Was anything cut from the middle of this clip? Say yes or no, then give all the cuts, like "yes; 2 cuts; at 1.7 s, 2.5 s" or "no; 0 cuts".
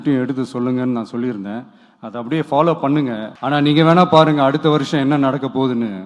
yes; 1 cut; at 3.3 s